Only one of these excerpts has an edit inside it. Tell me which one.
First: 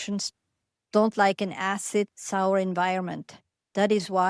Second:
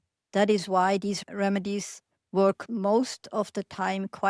first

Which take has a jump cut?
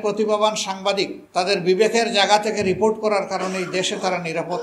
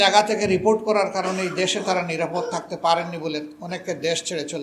first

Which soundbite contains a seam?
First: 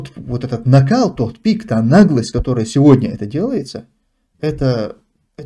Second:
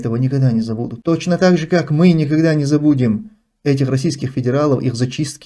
second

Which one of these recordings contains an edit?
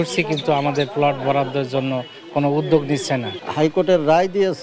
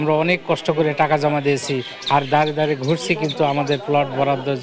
first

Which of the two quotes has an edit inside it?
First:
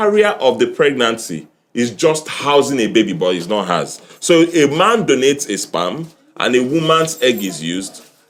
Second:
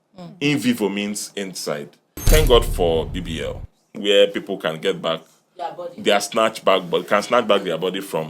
second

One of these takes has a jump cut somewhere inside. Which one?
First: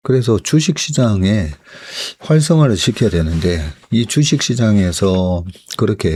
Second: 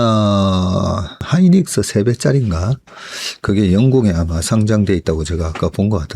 second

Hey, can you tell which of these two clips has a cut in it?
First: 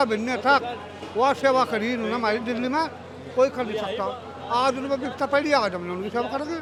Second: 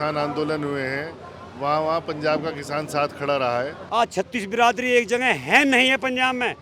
second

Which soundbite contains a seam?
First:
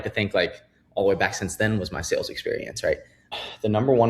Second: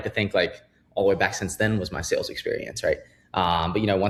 first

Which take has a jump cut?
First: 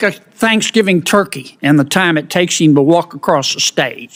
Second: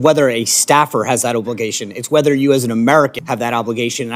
second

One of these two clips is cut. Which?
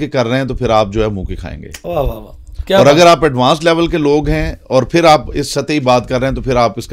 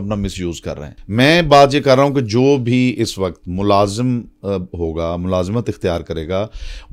second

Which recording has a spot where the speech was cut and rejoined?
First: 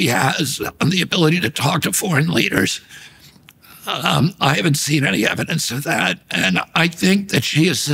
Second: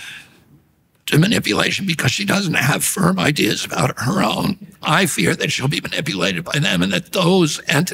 second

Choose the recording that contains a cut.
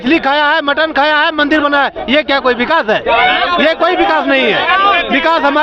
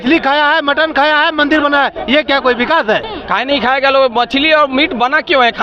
second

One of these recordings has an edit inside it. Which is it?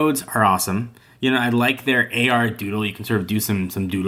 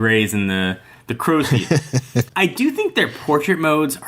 second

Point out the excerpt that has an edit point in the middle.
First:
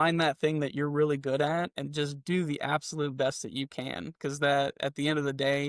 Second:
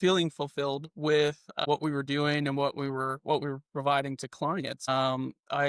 second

